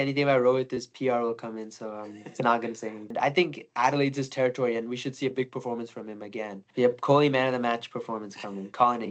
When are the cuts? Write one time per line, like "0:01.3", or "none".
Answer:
0:03.1
0:06.6